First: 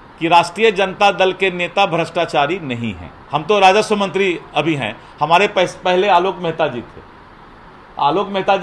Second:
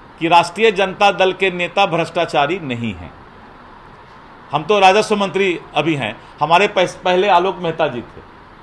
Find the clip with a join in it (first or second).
first